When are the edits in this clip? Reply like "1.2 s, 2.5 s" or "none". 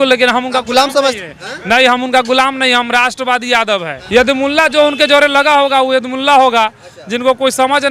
3.9 s